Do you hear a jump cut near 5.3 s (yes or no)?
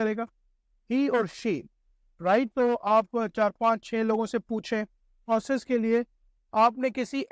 yes